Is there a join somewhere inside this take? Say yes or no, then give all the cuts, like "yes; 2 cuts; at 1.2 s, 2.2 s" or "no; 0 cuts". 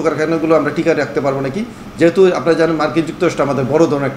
no; 0 cuts